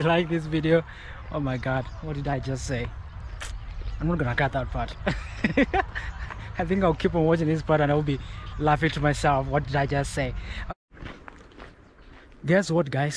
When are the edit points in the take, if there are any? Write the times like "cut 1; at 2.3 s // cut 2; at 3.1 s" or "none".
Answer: cut 1; at 10.5 s